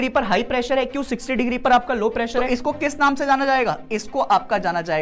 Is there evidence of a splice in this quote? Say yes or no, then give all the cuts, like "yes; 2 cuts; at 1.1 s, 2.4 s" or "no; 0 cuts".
yes; 1 cut; at 2.4 s